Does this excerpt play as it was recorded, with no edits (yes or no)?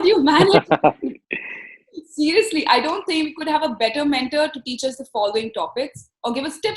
yes